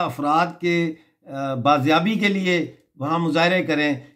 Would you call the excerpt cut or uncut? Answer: uncut